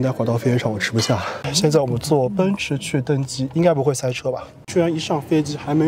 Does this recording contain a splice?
yes; 2 cuts; at 1.3 s, 4.7 s

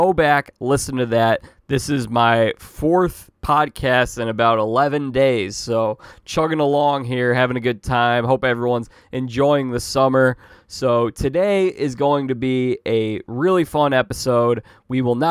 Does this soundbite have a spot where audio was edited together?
no; 0 cuts

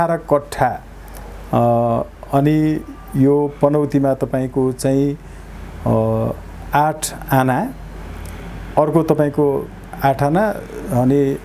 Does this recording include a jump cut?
no; 0 cuts

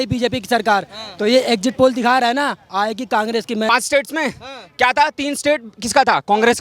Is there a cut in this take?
yes; 1 cut; at 3.7 s

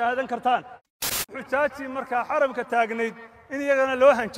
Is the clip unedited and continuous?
no; 1 cut; at 1.1 s

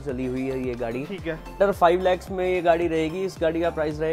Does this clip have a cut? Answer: yes; 1 cut; at 1.5 s

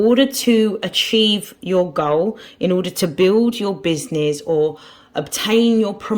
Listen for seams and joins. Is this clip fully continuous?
yes; 0 cuts

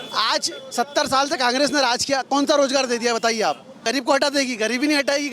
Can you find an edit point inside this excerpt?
yes; 1 cut; at 3.8 s

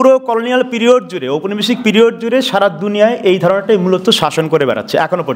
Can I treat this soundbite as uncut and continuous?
yes; 0 cuts

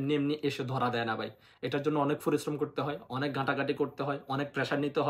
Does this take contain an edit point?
no; 0 cuts

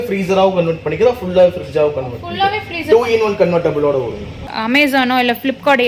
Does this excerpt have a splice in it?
yes; 1 cut; at 4.5 s

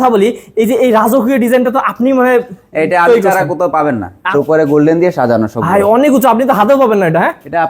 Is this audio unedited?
no; 1 cut; at 4.2 s

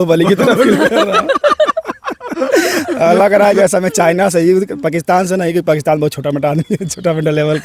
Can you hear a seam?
no; 0 cuts

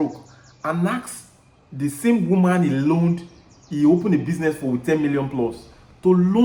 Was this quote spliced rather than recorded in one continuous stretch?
no; 0 cuts

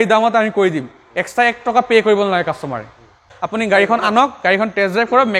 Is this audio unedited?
no; 1 cut; at 3.3 s

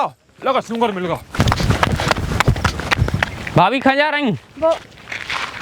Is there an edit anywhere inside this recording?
yes; 2 cuts; at 1.3 s, 3.4 s

